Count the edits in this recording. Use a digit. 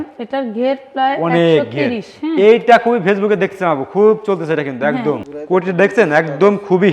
1